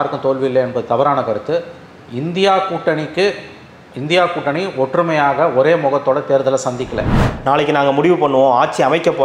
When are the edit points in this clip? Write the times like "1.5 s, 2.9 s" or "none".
7.2 s